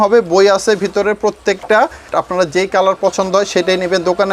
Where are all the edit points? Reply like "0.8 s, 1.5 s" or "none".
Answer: 2.1 s